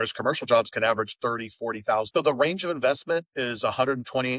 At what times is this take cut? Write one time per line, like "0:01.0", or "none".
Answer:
0:02.1